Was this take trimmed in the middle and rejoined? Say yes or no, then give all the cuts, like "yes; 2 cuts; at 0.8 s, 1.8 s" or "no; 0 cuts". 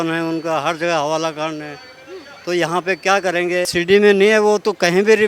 yes; 1 cut; at 3.7 s